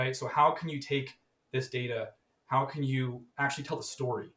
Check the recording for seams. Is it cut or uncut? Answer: uncut